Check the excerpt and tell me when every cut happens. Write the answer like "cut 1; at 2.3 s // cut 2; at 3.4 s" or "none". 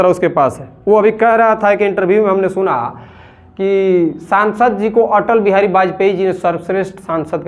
none